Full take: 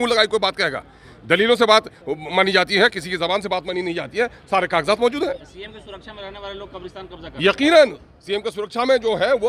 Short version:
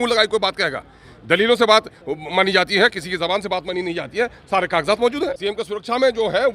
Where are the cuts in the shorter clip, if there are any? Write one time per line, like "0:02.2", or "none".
0:05.4